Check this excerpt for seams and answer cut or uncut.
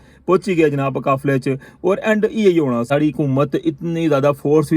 cut